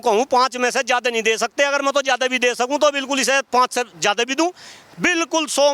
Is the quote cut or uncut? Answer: uncut